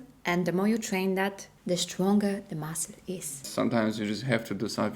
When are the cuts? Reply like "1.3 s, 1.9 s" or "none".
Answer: 1.5 s, 3.5 s